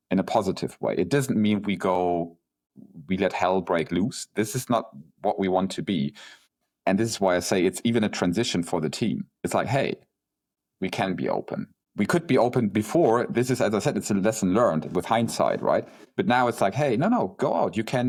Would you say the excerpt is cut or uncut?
uncut